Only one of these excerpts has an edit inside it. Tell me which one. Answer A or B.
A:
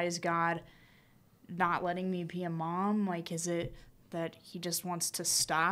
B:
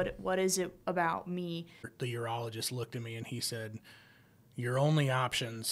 B